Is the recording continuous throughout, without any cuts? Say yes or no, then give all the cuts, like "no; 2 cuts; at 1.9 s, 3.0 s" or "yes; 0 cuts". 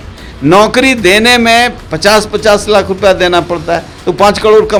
yes; 0 cuts